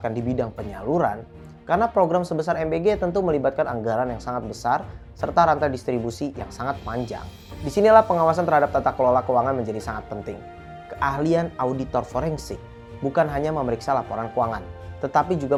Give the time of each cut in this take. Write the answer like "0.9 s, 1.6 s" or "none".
none